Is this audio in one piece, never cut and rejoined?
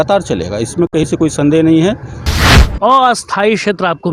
no; 1 cut; at 2.5 s

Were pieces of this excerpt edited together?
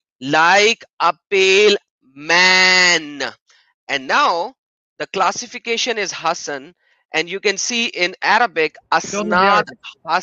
no; 0 cuts

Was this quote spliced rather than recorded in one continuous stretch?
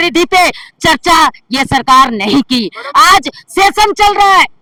no; 0 cuts

